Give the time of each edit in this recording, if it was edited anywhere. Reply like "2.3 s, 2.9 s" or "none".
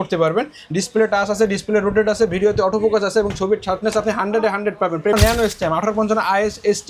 5.1 s